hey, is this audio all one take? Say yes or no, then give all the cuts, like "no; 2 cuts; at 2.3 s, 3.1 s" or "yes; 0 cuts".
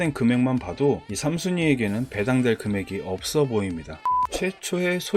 no; 1 cut; at 4.1 s